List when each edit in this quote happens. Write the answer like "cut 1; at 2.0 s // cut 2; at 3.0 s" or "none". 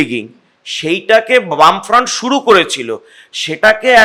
none